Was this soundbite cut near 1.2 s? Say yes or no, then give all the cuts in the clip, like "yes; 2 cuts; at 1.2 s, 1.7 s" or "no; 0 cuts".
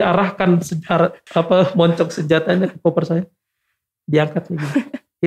yes; 1 cut; at 1.2 s